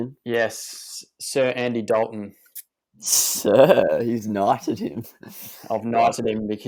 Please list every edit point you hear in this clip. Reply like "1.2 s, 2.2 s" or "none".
none